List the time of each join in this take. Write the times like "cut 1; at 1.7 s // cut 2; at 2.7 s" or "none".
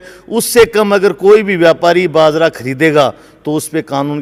none